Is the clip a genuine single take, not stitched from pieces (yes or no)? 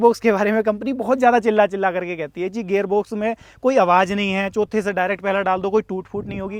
yes